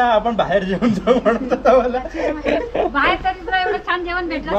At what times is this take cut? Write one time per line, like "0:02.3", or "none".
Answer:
none